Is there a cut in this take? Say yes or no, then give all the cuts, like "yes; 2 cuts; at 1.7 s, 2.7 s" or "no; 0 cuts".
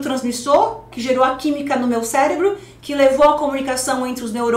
yes; 1 cut; at 0.9 s